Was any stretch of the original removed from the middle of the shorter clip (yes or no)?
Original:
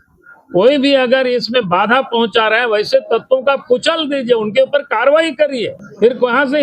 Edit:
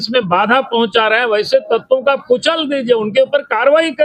no